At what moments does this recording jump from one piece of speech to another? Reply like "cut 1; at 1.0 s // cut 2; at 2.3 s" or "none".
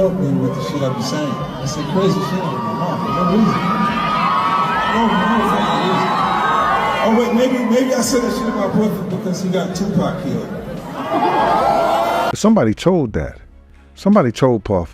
cut 1; at 12.3 s